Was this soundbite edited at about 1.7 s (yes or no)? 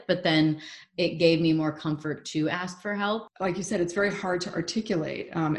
no